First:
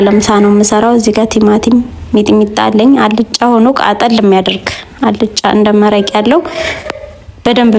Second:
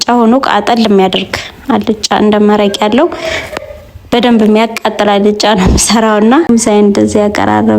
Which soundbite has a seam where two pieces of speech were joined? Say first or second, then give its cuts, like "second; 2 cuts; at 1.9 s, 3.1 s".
second; 1 cut; at 6.5 s